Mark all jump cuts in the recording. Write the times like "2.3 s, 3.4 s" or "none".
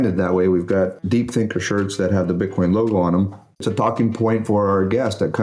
1.0 s, 3.6 s